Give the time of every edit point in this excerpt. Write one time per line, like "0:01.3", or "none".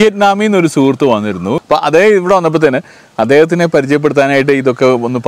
0:01.6